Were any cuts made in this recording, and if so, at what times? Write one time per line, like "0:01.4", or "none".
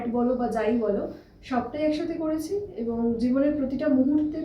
none